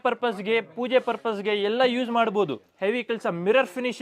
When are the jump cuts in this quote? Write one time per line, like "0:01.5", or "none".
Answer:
0:02.7